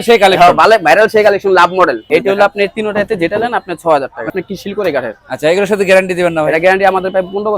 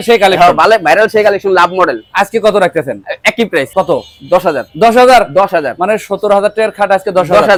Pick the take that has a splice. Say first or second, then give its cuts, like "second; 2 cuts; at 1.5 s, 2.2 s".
first; 2 cuts; at 2.0 s, 4.3 s